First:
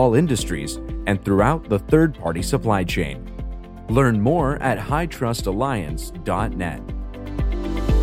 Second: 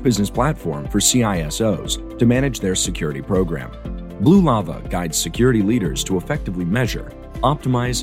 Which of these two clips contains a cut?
first; 1 cut; at 7.1 s

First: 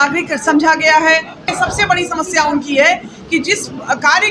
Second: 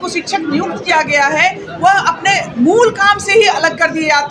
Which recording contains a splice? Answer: first; 1 cut; at 1.5 s

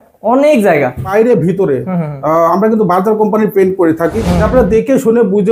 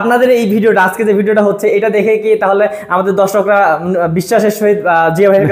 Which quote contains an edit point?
first; 2 cuts; at 1.1 s, 4.4 s

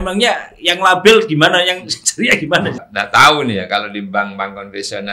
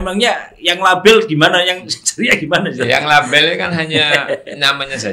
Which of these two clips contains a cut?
first; 1 cut; at 2.8 s

